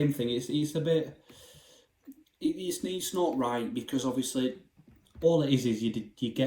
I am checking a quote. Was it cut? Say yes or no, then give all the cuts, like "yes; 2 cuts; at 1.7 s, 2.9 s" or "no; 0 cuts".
no; 0 cuts